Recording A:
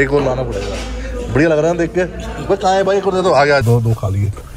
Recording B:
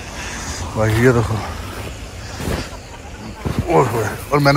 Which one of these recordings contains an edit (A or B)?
A